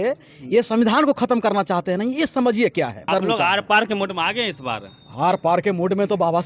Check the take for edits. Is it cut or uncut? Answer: cut